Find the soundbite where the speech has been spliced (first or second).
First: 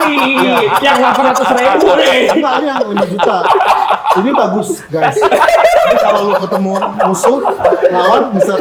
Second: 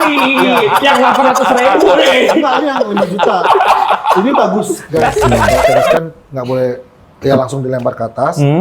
second